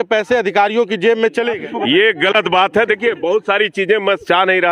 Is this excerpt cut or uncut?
cut